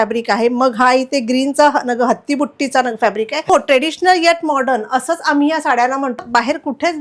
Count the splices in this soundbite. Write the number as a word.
two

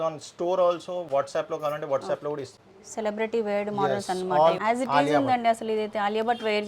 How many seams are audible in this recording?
two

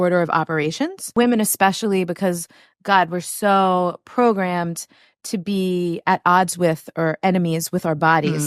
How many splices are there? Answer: one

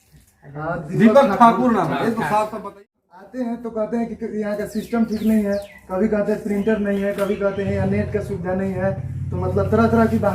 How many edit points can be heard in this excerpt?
one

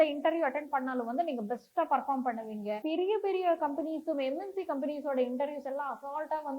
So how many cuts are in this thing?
one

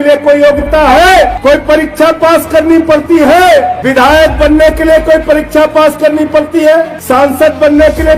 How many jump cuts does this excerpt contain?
three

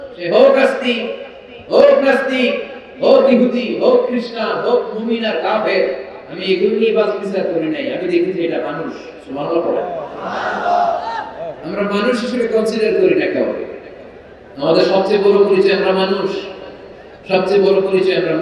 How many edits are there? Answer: zero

